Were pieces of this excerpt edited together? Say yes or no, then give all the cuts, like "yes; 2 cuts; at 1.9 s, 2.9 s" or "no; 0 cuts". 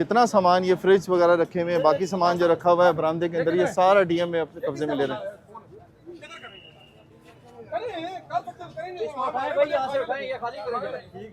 no; 0 cuts